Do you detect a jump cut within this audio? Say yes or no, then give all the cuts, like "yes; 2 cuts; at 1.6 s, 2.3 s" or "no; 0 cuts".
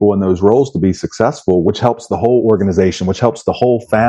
no; 0 cuts